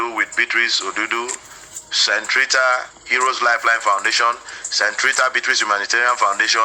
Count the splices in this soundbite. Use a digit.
0